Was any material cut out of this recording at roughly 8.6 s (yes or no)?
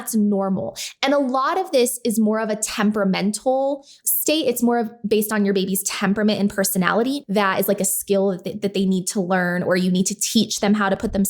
no